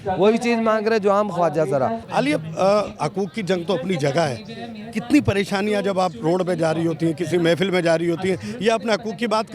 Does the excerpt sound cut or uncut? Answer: uncut